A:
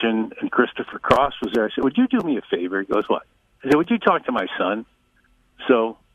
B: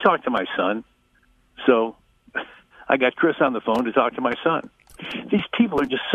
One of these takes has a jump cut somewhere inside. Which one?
B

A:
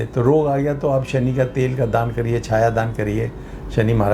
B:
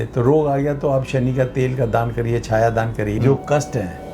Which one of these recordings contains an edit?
B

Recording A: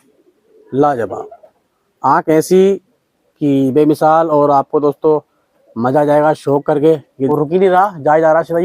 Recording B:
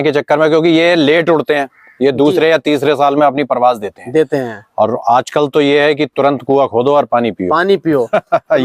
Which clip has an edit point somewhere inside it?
A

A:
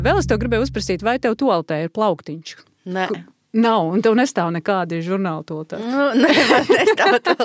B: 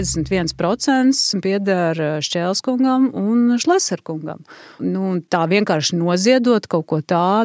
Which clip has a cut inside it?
B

